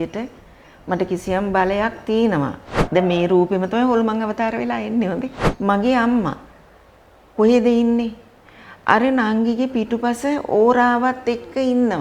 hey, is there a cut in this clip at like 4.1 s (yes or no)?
no